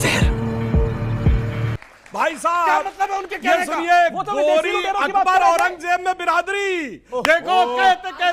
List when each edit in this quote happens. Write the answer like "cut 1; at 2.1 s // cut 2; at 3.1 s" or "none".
cut 1; at 1.8 s